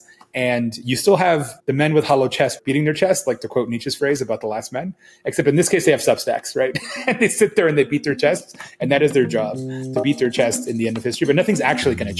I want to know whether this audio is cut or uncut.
cut